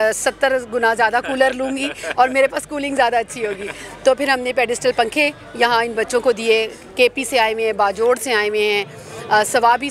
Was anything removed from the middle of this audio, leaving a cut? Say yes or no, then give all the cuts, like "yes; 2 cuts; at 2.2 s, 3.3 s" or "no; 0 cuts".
no; 0 cuts